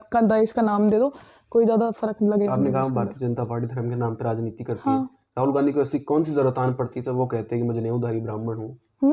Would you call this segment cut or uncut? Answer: uncut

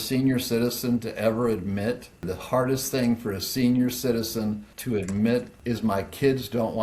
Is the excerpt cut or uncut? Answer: cut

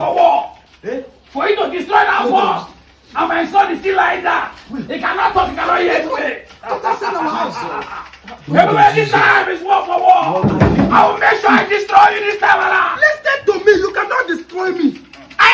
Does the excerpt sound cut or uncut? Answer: uncut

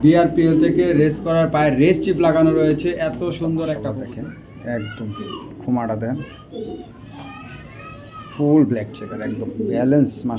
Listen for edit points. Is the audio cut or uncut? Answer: cut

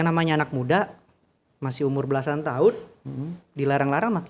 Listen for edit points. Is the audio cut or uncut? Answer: uncut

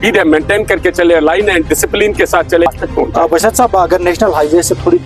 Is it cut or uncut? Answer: cut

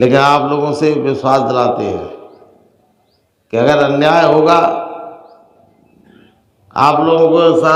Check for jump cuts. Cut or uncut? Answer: uncut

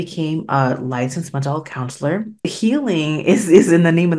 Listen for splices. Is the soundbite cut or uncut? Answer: cut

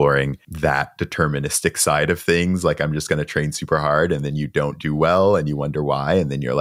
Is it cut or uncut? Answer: uncut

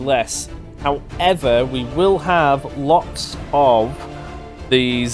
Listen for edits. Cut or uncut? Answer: uncut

